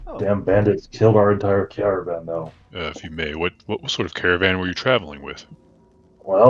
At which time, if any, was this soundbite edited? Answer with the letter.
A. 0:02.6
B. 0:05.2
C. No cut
A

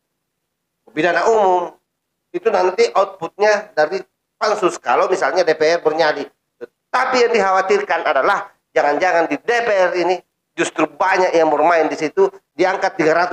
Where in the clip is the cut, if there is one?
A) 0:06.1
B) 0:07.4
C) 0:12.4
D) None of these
C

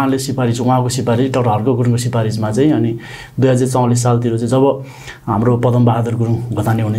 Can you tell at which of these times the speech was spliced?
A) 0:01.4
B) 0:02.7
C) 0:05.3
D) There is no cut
D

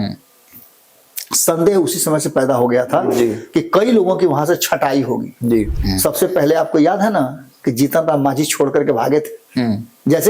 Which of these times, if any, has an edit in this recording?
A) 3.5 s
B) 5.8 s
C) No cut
B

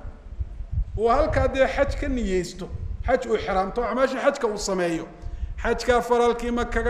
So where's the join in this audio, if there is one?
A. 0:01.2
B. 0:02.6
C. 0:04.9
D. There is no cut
D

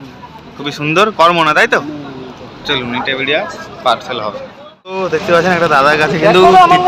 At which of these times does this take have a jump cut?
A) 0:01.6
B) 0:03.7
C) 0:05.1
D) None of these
D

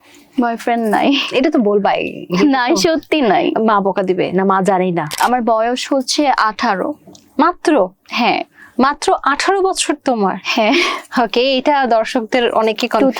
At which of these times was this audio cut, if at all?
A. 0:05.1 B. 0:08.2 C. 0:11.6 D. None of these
A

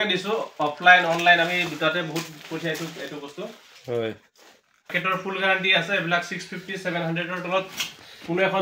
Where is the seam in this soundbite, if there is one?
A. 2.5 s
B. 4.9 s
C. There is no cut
B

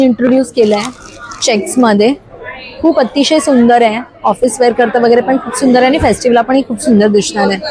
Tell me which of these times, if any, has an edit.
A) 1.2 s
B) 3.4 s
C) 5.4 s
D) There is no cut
D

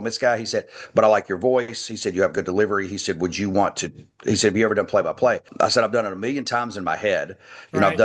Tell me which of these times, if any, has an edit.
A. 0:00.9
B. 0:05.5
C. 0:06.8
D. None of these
B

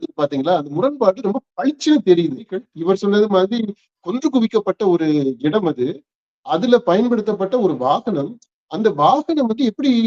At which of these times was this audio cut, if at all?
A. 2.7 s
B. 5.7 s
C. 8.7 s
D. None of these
A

